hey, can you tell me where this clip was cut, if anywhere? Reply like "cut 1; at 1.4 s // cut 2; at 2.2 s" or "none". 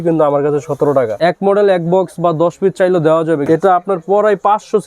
cut 1; at 1.1 s // cut 2; at 3.4 s